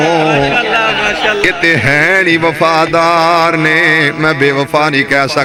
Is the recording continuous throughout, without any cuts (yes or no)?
yes